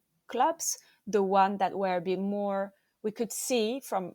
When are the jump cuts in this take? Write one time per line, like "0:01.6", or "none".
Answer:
none